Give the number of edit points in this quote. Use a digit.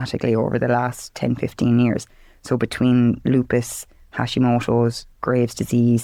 0